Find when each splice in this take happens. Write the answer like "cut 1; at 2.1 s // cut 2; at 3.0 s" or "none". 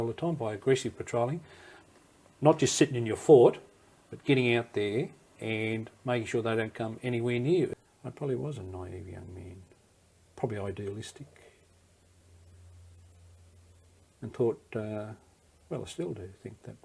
cut 1; at 7.7 s